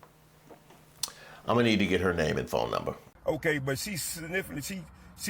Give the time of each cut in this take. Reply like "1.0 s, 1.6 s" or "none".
3.1 s